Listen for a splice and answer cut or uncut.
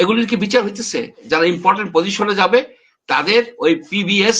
cut